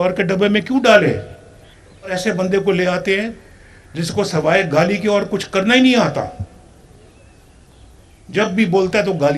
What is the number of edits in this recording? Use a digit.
1